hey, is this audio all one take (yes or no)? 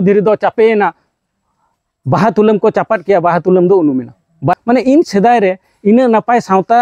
no